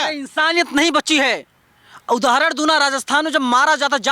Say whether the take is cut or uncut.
uncut